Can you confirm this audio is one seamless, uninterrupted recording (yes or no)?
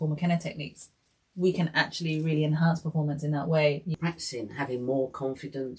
no